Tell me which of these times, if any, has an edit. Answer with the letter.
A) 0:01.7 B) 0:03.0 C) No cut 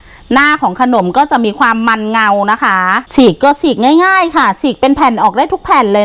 B